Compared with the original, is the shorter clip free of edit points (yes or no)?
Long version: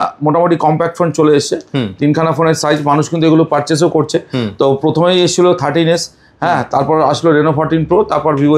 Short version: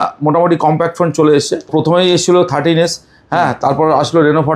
no